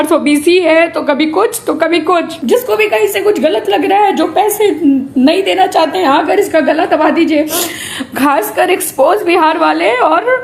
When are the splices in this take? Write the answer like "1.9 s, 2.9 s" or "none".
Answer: 2.3 s

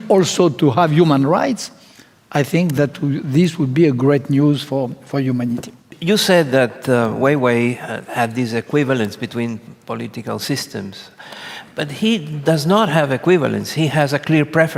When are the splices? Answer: none

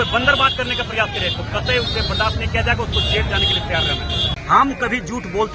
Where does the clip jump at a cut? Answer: 4.3 s

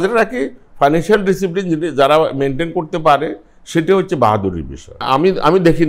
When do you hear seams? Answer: 5.0 s

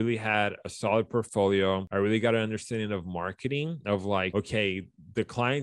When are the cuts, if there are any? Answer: none

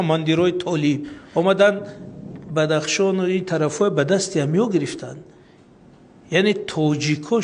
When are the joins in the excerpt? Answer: 1.1 s

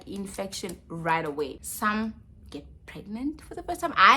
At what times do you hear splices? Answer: 1.6 s

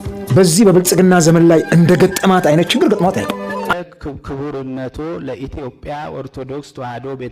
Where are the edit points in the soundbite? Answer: 3.7 s

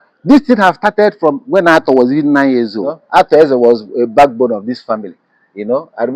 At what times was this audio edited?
3.0 s

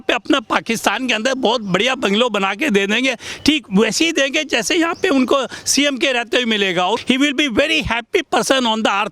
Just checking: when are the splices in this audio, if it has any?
7.0 s

